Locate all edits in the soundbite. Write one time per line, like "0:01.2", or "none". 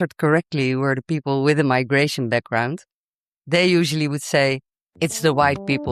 none